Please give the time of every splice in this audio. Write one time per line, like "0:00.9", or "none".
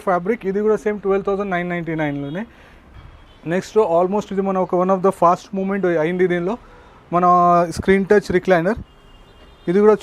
0:03.0